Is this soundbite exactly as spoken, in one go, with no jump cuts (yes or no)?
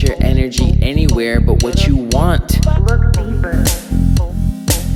yes